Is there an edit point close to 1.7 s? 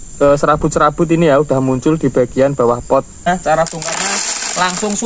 no; 1 cut; at 3.3 s

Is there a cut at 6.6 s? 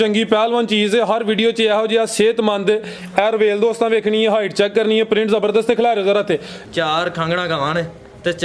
yes; 1 cut; at 6.6 s

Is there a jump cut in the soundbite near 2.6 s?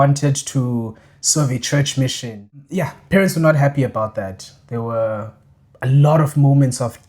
yes; 1 cut; at 2.6 s

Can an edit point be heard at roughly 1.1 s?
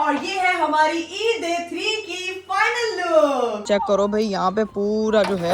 no; 1 cut; at 3.6 s

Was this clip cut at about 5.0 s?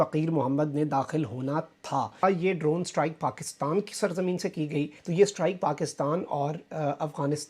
yes; 2 cuts; at 2.2 s, 5.0 s

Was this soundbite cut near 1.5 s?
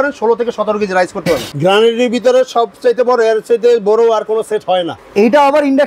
yes; 2 cuts; at 1.5 s, 4.9 s

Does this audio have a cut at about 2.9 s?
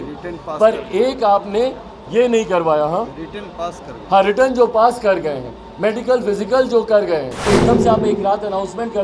no; 1 cut; at 7.5 s

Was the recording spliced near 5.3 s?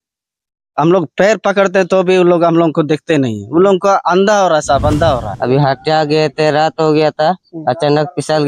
yes; 1 cut; at 5.3 s

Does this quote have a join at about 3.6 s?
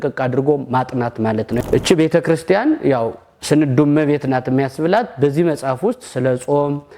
no; 1 cut; at 1.6 s

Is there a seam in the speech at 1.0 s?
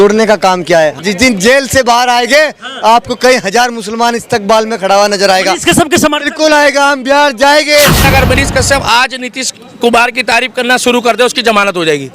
yes; 2 cuts; at 1.0 s, 8.0 s

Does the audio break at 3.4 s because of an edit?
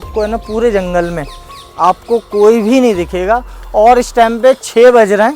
no; 0 cuts

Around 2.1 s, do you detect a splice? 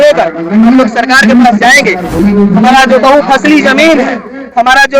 yes; 1 cut; at 2.1 s

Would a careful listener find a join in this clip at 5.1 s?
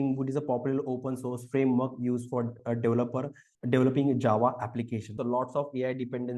yes; 1 cut; at 5.1 s

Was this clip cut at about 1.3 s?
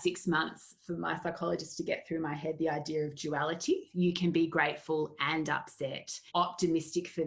no; 2 cuts; at 3.9 s, 6.2 s

